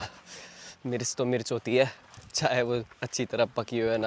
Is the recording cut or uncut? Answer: uncut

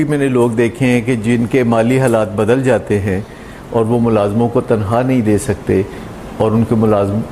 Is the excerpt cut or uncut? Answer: uncut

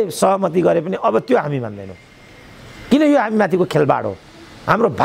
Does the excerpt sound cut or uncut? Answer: uncut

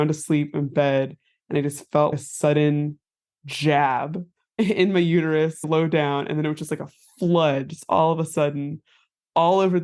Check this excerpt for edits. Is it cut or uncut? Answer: uncut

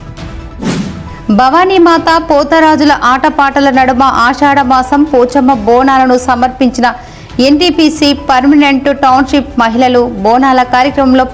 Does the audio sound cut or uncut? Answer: uncut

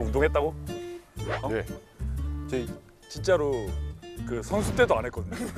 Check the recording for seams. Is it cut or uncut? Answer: uncut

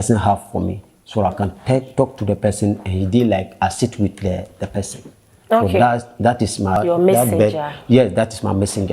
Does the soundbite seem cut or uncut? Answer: cut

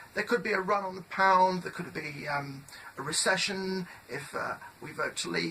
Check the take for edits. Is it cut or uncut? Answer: cut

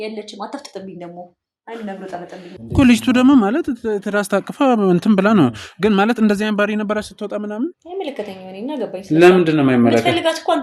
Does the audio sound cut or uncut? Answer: cut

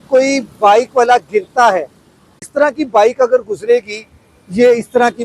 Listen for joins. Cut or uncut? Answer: cut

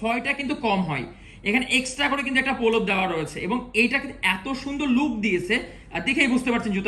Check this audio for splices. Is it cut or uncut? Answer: uncut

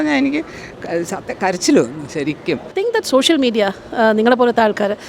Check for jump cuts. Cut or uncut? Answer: cut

